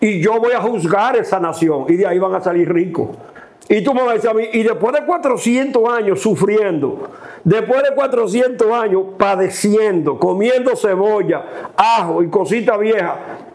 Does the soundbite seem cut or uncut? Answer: uncut